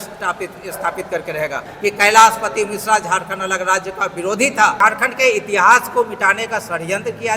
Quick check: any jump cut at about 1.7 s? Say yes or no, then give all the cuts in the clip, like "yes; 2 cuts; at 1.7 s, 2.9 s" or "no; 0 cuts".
yes; 2 cuts; at 1.7 s, 4.8 s